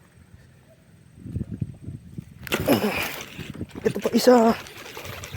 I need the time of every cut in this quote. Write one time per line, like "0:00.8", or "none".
0:02.2